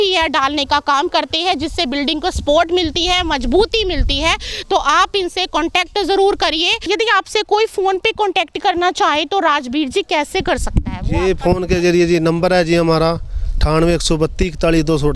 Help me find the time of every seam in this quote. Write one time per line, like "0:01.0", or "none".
0:06.9